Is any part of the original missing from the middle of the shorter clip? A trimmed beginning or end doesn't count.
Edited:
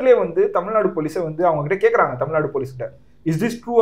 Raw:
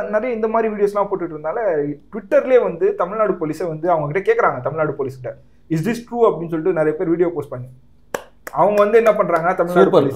no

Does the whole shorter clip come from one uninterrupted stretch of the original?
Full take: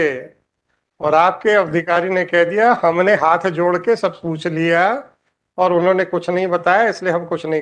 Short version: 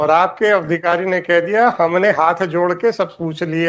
yes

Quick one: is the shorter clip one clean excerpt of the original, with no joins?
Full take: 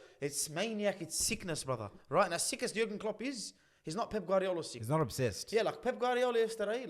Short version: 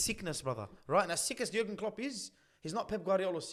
yes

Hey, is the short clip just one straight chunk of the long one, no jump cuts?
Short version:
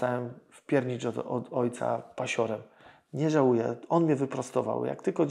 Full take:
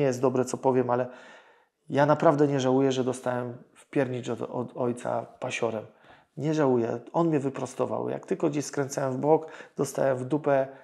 yes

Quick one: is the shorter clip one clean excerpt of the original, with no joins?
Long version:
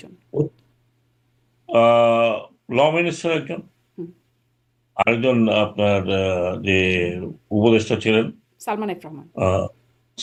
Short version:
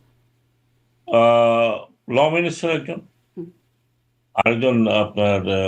yes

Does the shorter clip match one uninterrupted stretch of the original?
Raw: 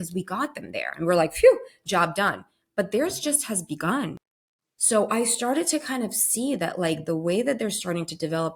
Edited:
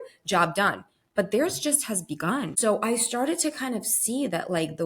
no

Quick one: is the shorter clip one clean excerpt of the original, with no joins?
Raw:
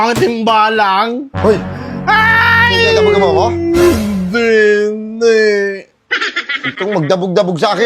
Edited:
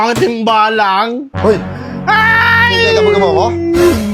yes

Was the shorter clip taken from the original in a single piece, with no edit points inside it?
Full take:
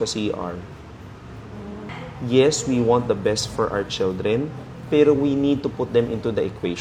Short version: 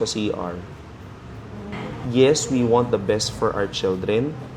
no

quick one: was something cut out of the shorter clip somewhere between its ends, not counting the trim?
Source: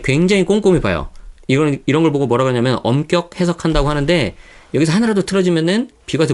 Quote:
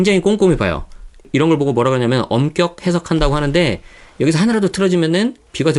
yes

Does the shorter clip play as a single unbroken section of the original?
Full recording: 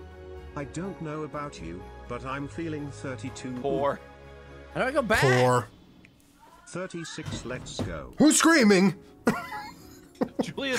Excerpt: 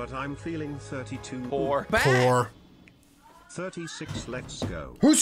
no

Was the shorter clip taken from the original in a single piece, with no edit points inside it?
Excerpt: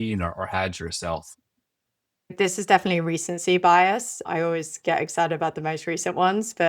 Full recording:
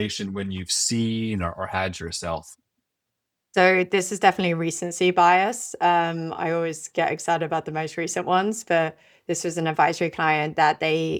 no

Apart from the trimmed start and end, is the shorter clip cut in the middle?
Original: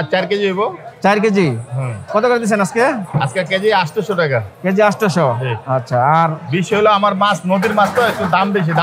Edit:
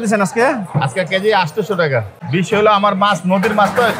yes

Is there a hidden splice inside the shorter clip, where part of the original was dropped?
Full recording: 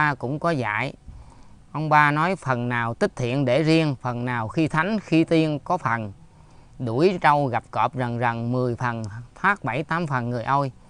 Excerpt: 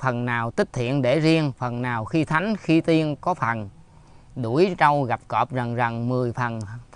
no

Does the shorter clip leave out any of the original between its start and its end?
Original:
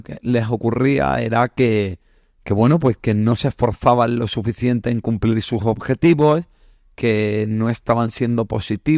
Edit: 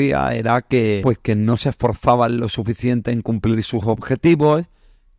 yes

